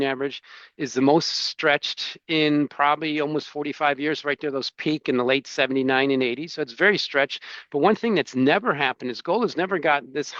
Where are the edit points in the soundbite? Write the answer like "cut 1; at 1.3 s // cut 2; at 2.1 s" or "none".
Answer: none